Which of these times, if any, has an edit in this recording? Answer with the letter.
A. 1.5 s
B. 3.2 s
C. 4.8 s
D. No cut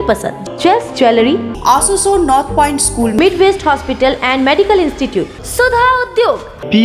A